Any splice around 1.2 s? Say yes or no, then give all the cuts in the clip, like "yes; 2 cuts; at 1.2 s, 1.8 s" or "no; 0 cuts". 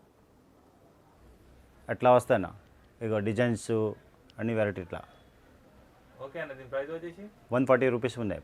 yes; 1 cut; at 1.2 s